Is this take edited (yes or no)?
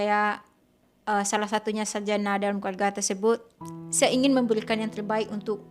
no